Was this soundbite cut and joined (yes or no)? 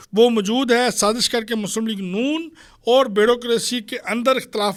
no